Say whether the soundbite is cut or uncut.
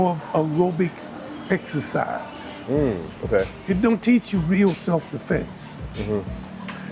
uncut